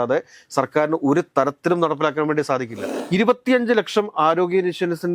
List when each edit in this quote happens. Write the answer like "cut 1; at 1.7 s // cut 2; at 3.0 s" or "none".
cut 1; at 2.8 s